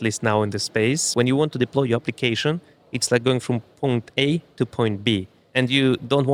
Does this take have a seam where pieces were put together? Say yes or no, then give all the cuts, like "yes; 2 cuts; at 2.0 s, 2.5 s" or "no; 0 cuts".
yes; 2 cuts; at 1.1 s, 5.4 s